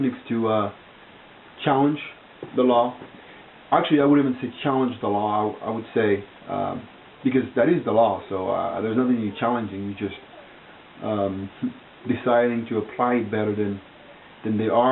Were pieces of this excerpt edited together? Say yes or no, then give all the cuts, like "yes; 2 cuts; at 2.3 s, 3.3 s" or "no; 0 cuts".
yes; 1 cut; at 5.0 s